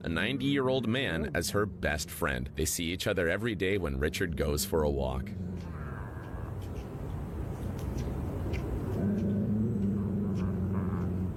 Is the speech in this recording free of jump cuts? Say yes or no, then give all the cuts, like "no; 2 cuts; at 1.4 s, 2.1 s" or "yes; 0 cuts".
yes; 0 cuts